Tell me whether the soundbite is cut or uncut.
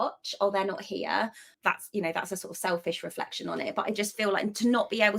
cut